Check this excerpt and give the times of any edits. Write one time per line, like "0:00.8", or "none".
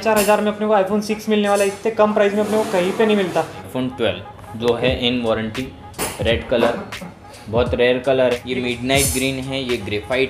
0:03.6
0:08.4